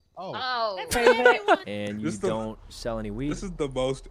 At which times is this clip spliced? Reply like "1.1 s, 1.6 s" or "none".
1.7 s